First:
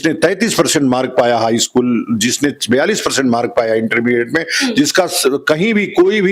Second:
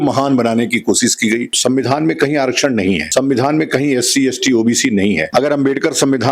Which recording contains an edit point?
second; 3 cuts; at 1.5 s, 3.1 s, 5.2 s

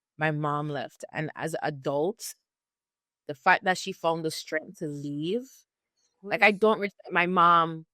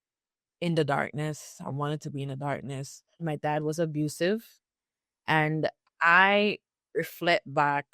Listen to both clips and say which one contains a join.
second; 1 cut; at 3.2 s

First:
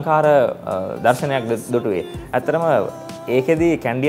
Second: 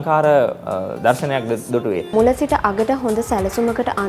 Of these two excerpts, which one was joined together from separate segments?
second; 1 cut; at 2.1 s

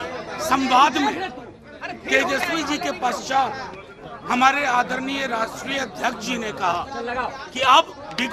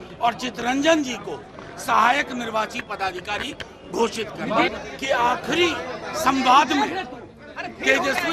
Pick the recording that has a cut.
second; 1 cut; at 4.7 s

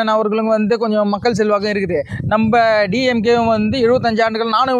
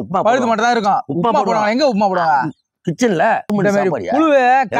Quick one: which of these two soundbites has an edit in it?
second; 1 cut; at 3.5 s

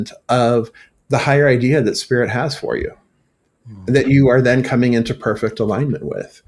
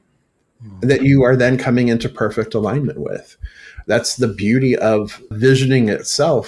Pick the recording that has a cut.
second; 1 cut; at 5.3 s

